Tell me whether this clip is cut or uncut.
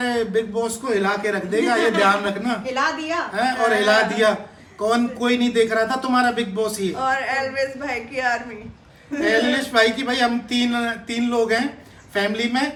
uncut